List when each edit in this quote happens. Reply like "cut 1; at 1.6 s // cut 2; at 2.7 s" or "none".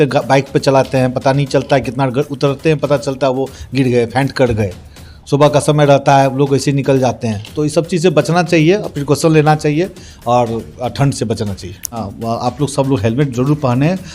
cut 1; at 12.0 s